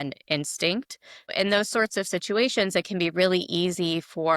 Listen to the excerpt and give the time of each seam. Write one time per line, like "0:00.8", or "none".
0:01.3

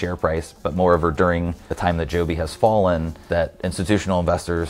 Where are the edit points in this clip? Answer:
0:01.6
0:03.1

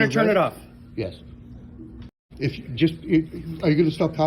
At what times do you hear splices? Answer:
0:02.6

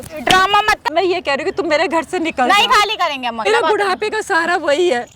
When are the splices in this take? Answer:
0:00.8
0:03.4

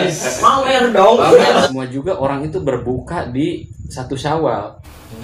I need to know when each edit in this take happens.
0:01.7

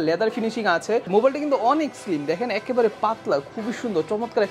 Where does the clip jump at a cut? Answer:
none

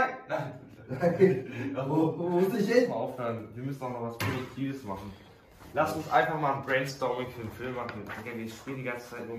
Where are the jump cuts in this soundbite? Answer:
0:02.9

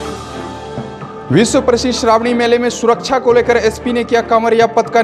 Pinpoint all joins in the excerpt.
0:01.0

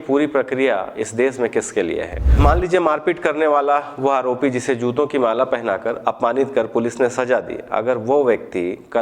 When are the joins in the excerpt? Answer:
0:02.3

